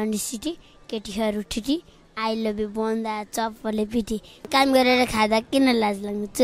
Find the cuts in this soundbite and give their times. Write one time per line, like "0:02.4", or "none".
0:04.5